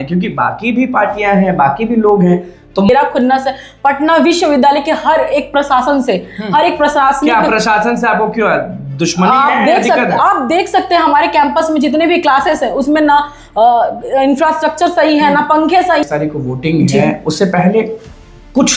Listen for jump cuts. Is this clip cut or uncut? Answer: cut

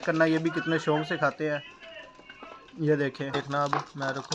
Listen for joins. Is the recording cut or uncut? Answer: cut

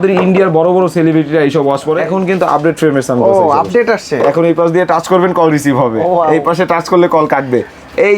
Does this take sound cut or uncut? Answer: cut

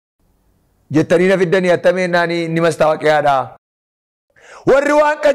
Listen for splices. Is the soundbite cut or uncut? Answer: cut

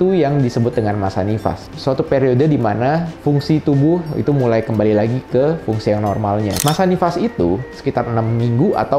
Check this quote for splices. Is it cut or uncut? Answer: cut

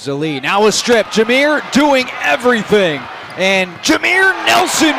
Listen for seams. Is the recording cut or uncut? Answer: uncut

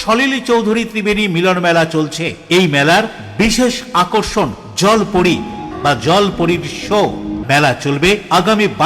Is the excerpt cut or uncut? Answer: cut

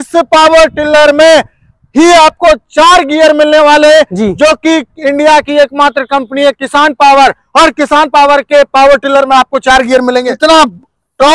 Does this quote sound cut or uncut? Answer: cut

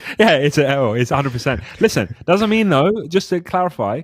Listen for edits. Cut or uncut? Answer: uncut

